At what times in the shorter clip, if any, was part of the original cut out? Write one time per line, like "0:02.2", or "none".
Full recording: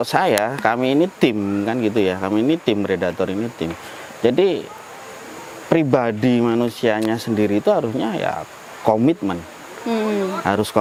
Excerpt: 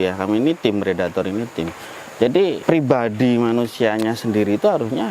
0:02.6